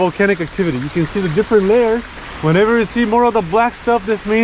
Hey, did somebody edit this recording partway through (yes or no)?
no